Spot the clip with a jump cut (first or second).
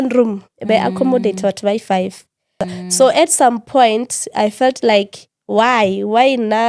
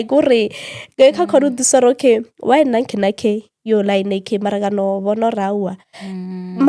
first